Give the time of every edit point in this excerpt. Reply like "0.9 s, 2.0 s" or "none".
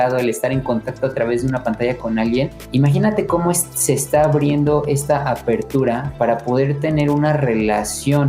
2.6 s